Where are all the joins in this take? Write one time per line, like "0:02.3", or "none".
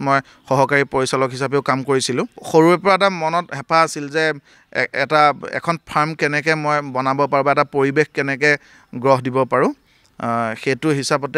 0:02.4